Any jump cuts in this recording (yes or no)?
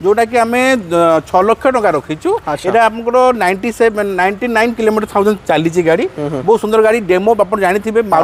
no